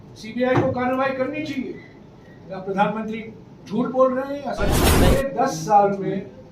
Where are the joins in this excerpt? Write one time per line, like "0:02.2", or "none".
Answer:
0:04.9